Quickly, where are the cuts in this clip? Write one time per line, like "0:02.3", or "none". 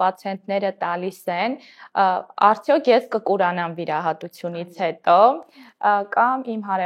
none